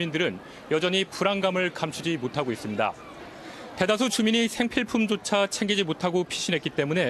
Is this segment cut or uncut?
cut